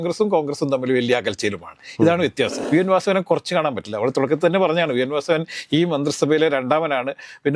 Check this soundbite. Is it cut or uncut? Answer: cut